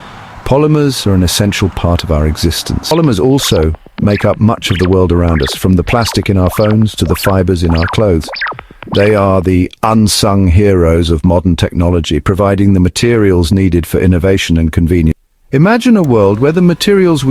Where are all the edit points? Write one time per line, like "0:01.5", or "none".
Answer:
0:02.9
0:15.2